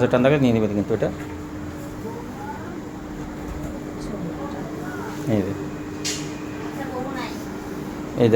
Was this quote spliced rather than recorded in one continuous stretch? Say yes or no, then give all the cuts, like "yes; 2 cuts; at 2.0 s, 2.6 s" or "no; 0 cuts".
no; 0 cuts